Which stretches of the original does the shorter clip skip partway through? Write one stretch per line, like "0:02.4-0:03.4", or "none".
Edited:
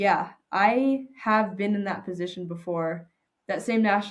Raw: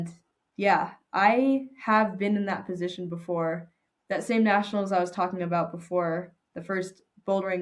none

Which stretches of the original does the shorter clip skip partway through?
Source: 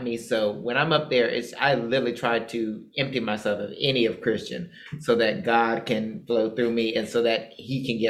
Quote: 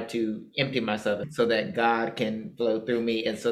0:03.7-0:05.0

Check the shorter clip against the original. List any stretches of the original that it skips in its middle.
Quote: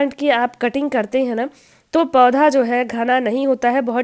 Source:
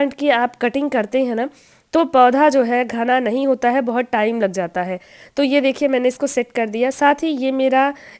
none

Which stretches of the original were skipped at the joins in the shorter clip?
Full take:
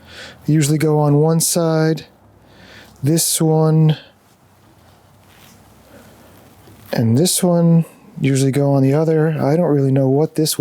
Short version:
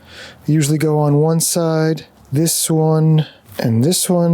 0:02.1-0:02.9
0:04.1-0:06.8

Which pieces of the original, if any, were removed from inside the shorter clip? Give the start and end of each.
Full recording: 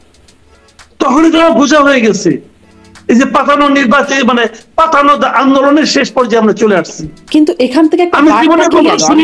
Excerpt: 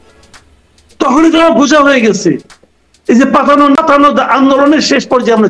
0:03.8-0:04.8

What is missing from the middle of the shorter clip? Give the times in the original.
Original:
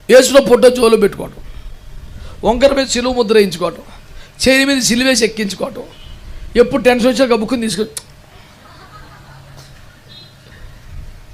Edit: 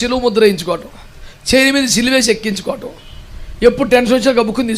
none

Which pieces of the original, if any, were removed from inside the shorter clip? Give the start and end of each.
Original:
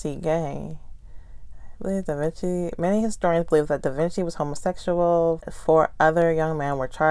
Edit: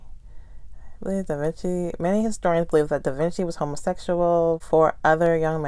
0:05.4-0:05.6

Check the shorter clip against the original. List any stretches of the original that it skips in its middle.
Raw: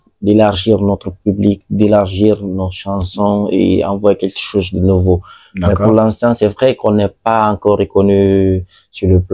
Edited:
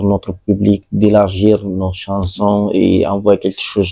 none

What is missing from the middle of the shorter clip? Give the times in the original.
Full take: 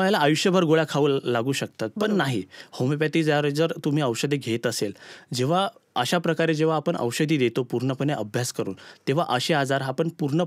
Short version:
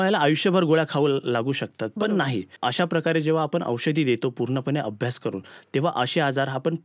0:02.5-0:05.8

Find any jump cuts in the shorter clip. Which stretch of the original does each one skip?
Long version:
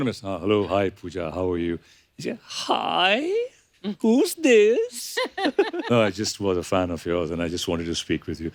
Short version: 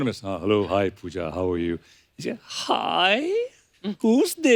none

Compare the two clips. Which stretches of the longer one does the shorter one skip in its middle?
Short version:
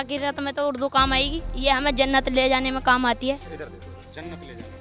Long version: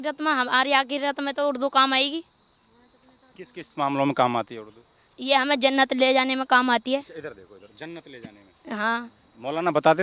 0:02.2-0:05.1

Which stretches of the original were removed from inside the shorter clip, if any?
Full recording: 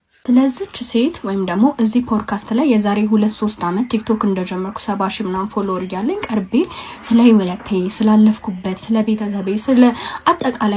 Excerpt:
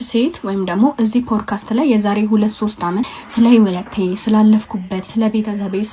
0:03.9-0:06.8

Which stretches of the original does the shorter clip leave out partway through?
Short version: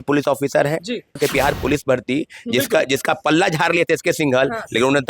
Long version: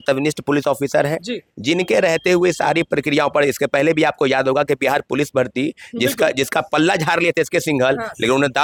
0:01.6-0:04.7

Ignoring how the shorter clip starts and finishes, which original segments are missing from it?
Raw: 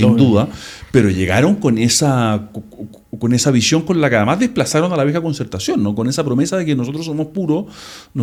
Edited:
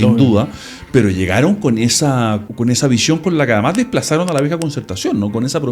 0:02.5-0:03.1

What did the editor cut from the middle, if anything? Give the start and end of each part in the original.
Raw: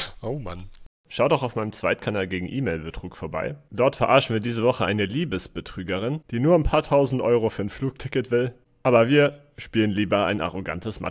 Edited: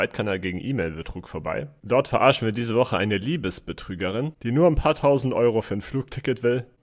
none

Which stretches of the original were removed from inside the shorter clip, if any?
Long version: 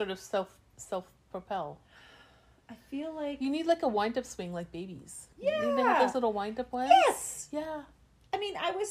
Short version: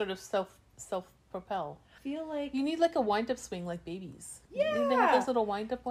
0:01.9-0:02.7

